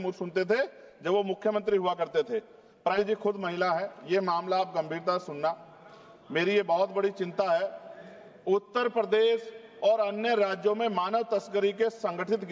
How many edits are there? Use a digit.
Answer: 1